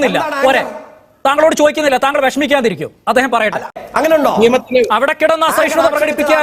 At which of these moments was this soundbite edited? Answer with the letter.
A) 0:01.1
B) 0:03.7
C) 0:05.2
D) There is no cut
B